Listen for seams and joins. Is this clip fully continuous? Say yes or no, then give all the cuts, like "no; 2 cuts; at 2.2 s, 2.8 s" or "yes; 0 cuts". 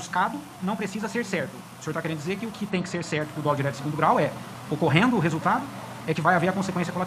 yes; 0 cuts